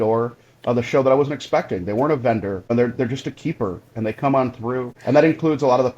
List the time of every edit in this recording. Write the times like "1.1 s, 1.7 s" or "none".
2.7 s, 4.9 s